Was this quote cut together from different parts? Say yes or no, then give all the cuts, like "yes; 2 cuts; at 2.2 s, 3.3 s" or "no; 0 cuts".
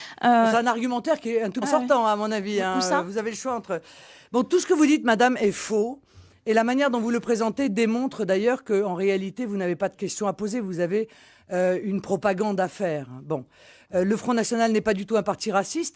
no; 0 cuts